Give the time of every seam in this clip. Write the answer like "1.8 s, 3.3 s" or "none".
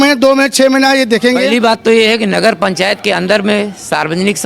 1.5 s